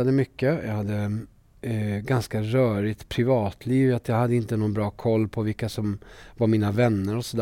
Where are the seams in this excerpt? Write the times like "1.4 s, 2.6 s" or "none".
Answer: none